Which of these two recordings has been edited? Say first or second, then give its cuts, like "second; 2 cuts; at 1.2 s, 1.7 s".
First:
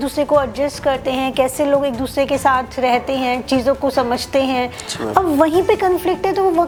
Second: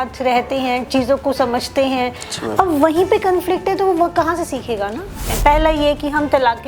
second; 1 cut; at 5.3 s